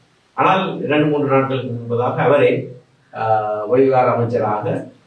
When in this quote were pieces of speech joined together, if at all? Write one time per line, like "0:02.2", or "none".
none